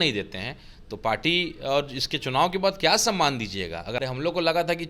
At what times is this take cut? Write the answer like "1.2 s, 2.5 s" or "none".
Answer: 4.0 s